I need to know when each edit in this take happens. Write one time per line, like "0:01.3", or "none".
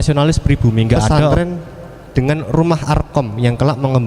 0:01.3

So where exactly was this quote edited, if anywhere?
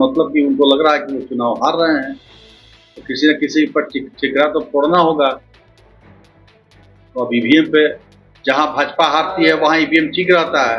none

